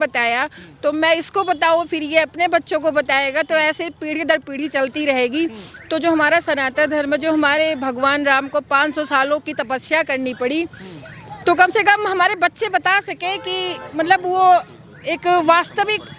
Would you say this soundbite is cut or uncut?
uncut